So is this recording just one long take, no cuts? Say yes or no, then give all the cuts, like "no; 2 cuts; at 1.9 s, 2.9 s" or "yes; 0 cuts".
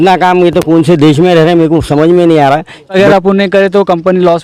no; 1 cut; at 3.0 s